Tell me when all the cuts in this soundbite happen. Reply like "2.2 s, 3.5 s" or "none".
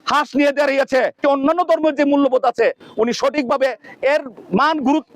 1.2 s